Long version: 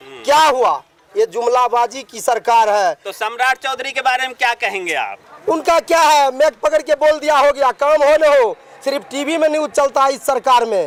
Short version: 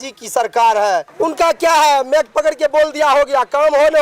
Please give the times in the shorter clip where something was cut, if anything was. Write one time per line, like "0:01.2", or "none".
0:01.1